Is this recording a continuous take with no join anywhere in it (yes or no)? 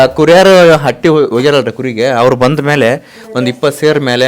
yes